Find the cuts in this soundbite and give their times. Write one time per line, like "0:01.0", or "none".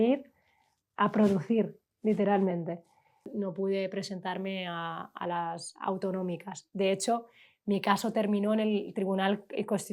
0:03.4